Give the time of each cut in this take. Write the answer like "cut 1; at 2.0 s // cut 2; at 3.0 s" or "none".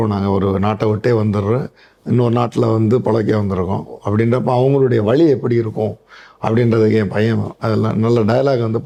none